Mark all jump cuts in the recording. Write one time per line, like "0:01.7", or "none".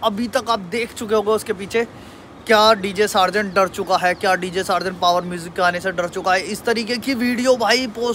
none